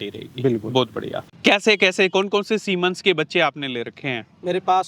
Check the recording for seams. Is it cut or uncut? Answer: cut